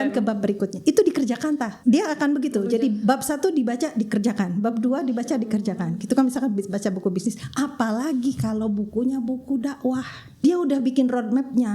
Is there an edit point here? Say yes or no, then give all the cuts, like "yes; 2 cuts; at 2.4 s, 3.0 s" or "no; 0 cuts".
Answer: yes; 2 cuts; at 1.7 s, 10.4 s